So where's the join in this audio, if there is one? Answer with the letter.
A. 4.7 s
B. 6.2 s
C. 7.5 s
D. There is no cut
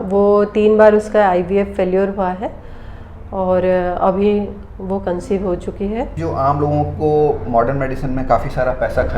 B